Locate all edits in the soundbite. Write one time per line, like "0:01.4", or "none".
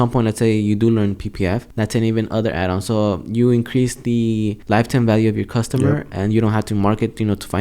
0:01.7
0:04.6